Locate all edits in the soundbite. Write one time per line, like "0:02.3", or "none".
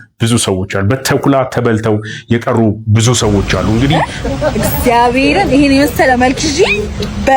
0:03.9

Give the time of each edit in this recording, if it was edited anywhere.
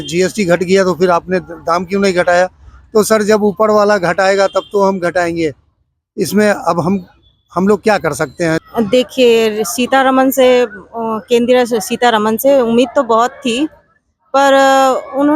0:08.7

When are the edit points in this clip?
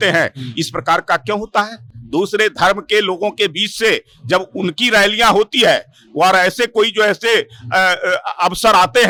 none

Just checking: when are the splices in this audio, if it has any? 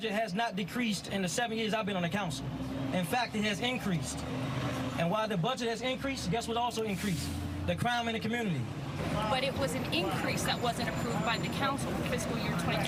none

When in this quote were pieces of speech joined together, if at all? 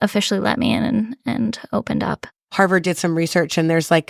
0:02.3

